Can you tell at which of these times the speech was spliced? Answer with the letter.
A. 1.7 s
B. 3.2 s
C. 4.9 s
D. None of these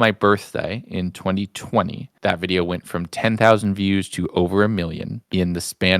D